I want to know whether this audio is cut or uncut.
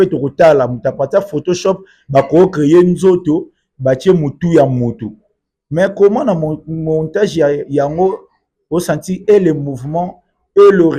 uncut